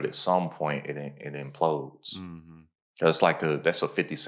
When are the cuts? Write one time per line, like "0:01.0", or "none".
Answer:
none